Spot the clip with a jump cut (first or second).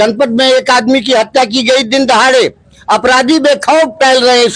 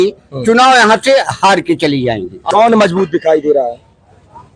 second